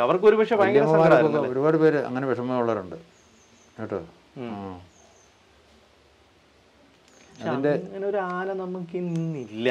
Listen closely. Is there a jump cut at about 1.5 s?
no; 0 cuts

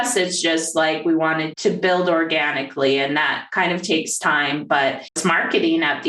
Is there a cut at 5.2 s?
yes; 2 cuts; at 1.5 s, 5.2 s

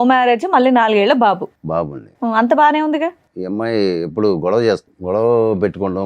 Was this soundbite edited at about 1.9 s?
no; 2 cuts; at 3.3 s, 4.9 s

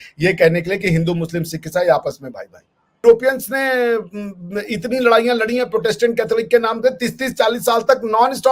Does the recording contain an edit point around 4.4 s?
no; 1 cut; at 3.0 s

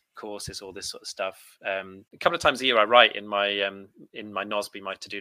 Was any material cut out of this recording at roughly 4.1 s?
no; 1 cut; at 2.1 s

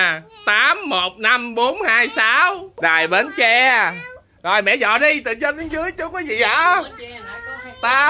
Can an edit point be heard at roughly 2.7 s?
yes; 1 cut; at 2.7 s

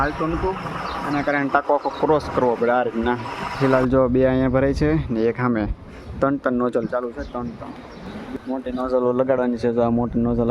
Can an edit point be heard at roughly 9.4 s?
no; 2 cuts; at 3.6 s, 8.2 s

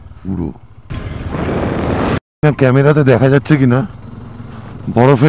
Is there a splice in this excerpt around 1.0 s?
yes; 1 cut; at 1.0 s

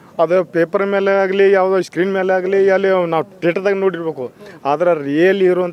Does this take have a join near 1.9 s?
no; 1 cut; at 3.3 s

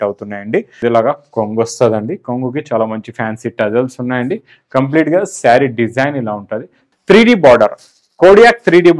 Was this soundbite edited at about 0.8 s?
yes; 2 cuts; at 0.8 s, 6.8 s

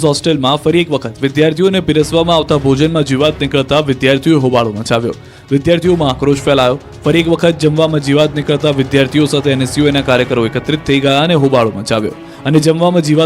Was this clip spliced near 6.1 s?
yes; 1 cut; at 6.1 s

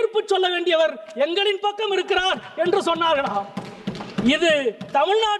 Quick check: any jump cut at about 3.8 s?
no; 0 cuts

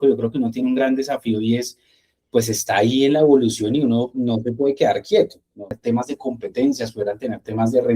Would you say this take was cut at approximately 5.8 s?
yes; 1 cut; at 5.8 s

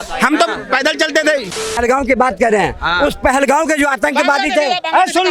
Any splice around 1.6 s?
yes; 1 cut; at 1.6 s

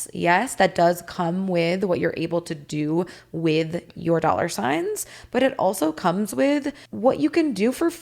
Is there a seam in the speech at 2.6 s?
no; 1 cut; at 6.8 s

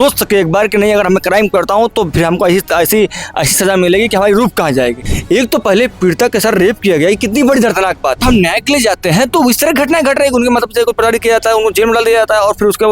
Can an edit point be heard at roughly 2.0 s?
no; 2 cuts; at 5.1 s, 8.2 s

